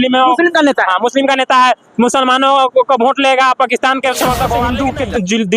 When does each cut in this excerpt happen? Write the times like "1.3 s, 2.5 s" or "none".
4.7 s